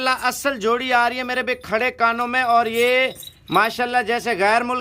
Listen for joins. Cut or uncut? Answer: uncut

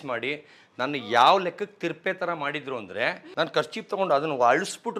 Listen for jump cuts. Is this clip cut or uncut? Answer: cut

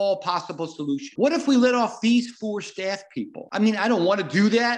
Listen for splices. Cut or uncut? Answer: cut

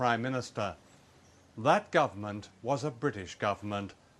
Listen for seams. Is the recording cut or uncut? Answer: cut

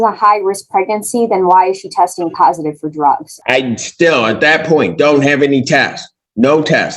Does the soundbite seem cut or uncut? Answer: cut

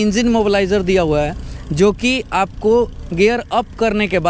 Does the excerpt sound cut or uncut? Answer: uncut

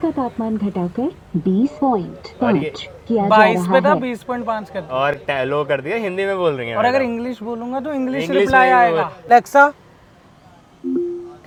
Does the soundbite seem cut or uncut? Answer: uncut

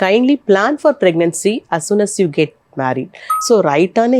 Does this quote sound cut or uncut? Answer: cut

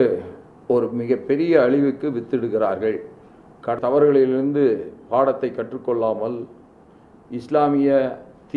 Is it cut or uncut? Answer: cut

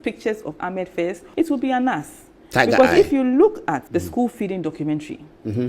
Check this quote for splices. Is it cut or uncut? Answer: cut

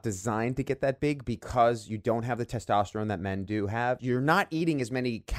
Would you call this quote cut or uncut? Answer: cut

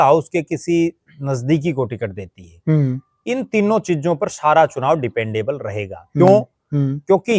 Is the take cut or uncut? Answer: uncut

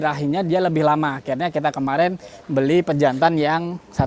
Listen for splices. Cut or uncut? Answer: uncut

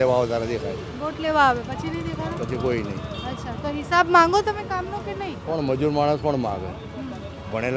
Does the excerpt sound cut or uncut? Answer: uncut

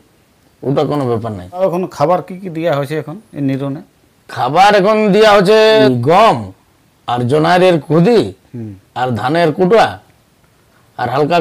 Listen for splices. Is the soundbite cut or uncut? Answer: cut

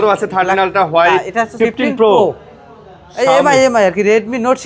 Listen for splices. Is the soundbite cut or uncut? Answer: cut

